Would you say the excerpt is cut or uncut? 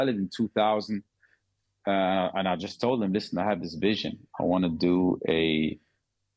uncut